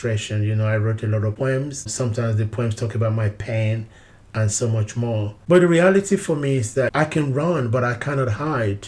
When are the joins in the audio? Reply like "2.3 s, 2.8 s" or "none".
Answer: 1.5 s, 5.4 s, 6.9 s